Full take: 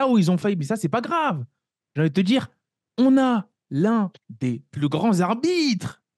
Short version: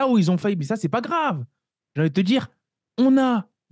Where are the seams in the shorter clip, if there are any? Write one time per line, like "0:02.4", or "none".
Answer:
none